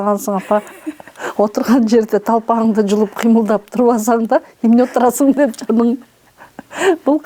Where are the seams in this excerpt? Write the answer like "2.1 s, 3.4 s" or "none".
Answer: none